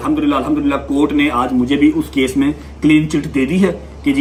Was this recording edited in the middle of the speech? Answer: no; 0 cuts

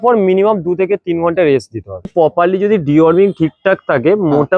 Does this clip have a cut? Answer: yes; 1 cut; at 2.1 s

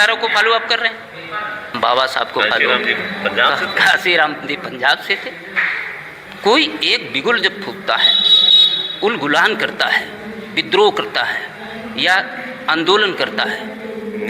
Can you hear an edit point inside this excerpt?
yes; 1 cut; at 1.8 s

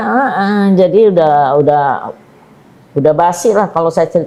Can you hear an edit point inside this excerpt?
no; 0 cuts

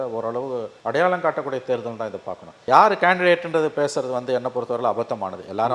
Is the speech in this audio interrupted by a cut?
no; 0 cuts

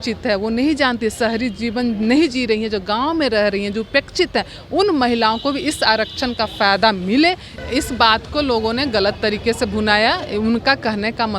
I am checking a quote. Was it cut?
yes; 1 cut; at 7.6 s

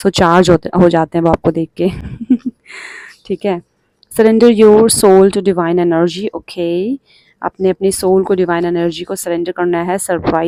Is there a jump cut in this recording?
no; 0 cuts

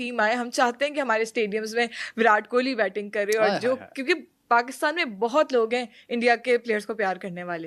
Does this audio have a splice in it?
no; 0 cuts

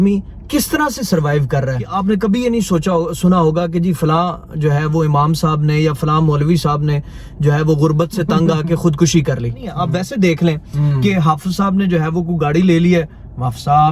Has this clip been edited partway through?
yes; 2 cuts; at 1.9 s, 9.8 s

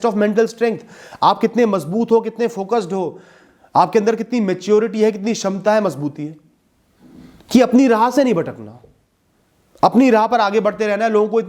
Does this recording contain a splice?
no; 0 cuts

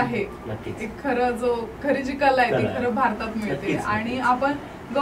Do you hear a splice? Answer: no; 0 cuts

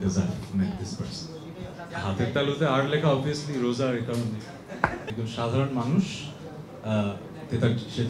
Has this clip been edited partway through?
yes; 2 cuts; at 1.9 s, 5.1 s

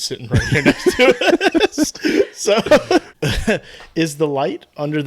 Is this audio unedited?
no; 1 cut; at 3.1 s

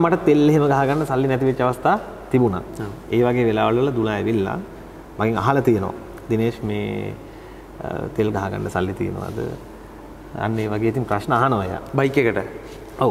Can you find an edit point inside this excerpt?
no; 0 cuts

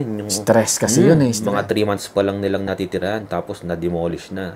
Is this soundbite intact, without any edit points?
no; 1 cut; at 1.4 s

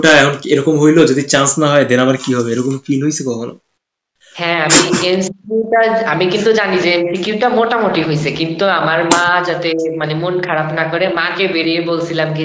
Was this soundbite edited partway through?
no; 0 cuts

